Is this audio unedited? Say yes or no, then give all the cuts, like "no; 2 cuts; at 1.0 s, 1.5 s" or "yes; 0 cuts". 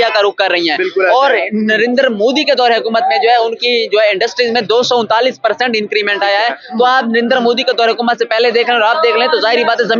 yes; 0 cuts